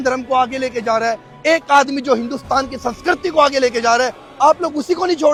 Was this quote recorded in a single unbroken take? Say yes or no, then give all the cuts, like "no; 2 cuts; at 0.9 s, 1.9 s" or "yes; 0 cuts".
yes; 0 cuts